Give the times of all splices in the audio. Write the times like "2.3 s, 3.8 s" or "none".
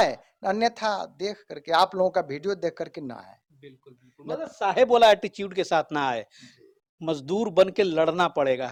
none